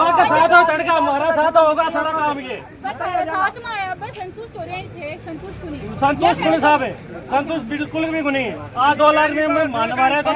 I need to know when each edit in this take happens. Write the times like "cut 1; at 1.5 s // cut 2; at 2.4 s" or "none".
none